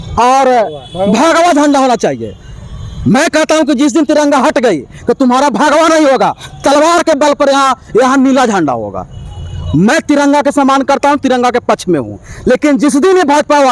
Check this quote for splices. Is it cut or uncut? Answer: uncut